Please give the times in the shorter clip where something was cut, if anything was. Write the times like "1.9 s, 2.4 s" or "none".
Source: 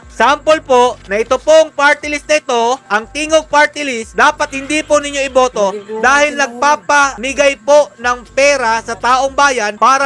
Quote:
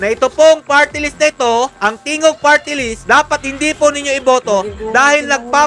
none

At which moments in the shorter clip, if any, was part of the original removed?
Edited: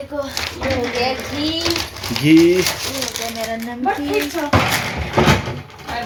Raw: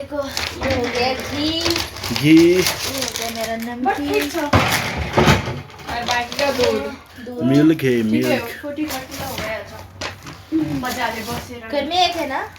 none

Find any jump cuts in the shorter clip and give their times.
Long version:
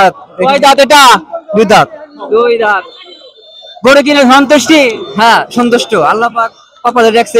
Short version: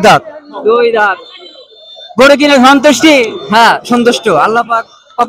none

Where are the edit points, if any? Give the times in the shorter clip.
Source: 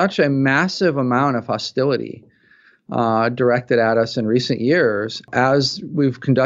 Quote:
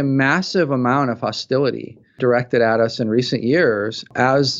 2.2 s

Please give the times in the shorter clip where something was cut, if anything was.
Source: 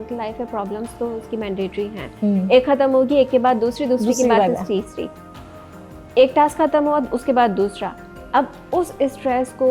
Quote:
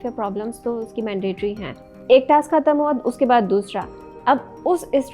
1.7 s

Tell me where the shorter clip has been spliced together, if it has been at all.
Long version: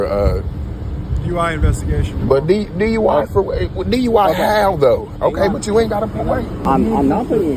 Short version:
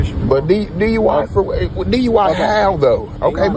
none

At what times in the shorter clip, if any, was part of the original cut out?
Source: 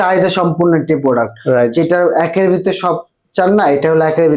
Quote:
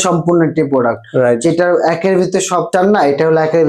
2.7 s

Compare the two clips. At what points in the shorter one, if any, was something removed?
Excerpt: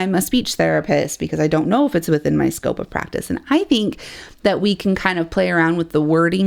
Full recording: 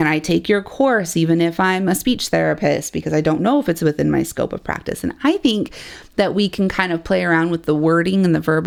none

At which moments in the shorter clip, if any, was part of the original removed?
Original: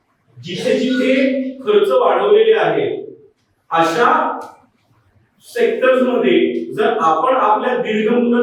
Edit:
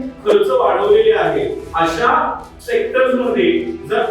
1.6 s, 2.5 s

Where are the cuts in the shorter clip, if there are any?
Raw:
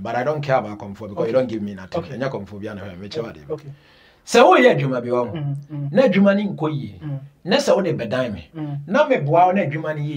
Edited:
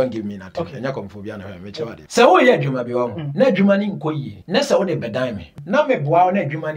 2.0 s, 3.2 s, 4.3 s, 5.5 s

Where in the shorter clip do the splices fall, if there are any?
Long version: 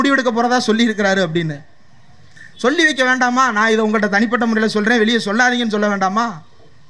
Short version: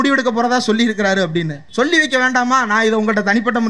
1.6 s

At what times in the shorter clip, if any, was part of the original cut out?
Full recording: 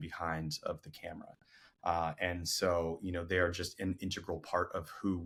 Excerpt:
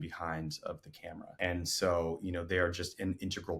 1.4 s

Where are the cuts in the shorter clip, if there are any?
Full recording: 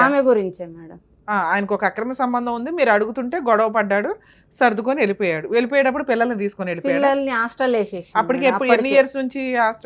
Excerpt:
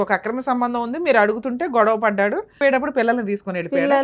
2.6 s

